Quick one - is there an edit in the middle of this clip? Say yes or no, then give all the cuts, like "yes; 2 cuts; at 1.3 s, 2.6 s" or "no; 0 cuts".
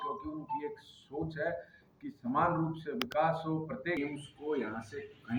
yes; 1 cut; at 4.0 s